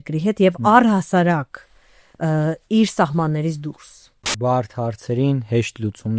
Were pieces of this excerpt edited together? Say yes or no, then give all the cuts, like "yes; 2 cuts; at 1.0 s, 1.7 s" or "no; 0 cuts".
yes; 1 cut; at 4.3 s